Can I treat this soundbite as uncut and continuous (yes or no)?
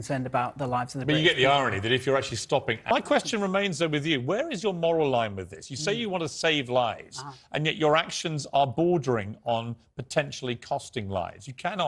no